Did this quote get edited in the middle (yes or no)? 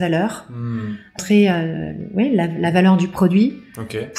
yes